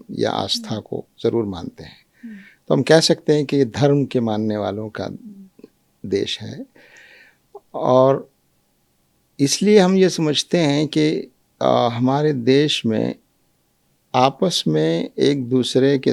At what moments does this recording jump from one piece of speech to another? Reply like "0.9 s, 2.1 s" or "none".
none